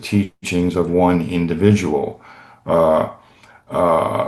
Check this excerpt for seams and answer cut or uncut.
uncut